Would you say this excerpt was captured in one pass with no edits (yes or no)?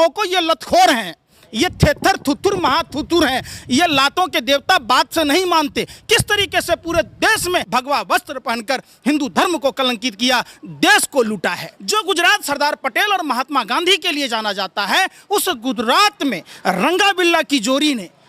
no